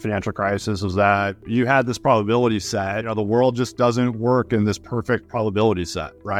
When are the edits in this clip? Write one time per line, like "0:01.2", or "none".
0:01.4
0:03.1